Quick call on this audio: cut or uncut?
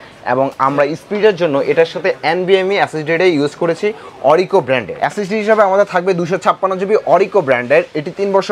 cut